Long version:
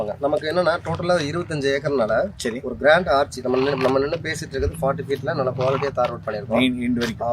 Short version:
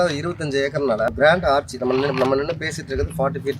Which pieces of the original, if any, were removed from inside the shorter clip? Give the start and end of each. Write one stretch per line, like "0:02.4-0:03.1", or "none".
0:02.2-0:02.7